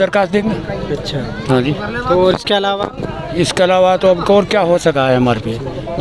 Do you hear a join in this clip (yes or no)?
no